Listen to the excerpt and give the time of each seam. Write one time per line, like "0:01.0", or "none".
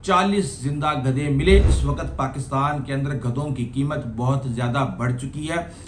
0:01.7